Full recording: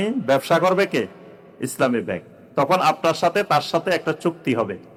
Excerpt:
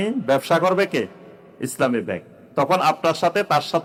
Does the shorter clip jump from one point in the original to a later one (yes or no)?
no